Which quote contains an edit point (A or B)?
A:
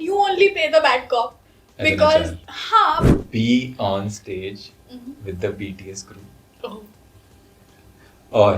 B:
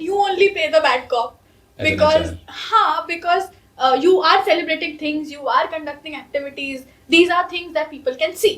A